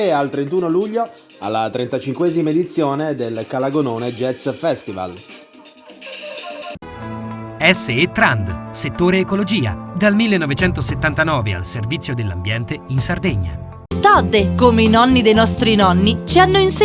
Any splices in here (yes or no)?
no